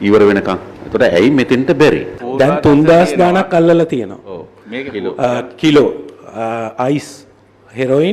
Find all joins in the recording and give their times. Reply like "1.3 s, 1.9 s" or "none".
2.1 s